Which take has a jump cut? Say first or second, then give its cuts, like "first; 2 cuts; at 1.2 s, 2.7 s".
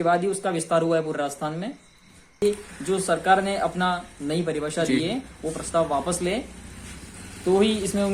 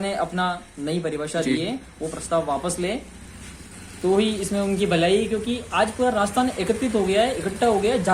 first; 1 cut; at 2.4 s